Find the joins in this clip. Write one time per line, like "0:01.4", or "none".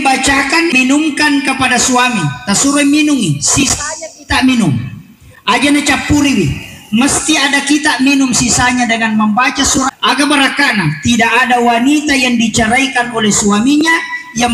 0:00.7
0:09.9